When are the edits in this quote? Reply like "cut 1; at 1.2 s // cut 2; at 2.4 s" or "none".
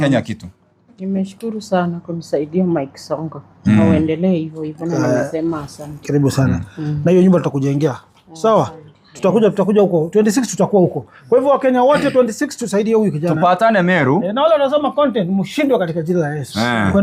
none